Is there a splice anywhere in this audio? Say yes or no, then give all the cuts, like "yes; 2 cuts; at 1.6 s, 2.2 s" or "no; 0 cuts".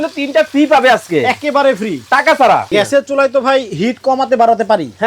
yes; 1 cut; at 2.7 s